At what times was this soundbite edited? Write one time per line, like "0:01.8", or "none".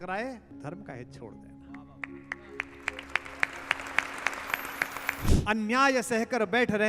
0:05.4